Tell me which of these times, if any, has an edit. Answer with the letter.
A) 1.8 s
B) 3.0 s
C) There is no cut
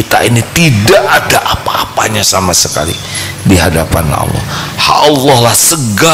C